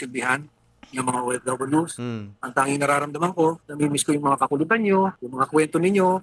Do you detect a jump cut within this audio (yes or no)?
yes